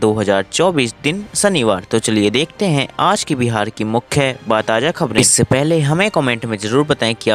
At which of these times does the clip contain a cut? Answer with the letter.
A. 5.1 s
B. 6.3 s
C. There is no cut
A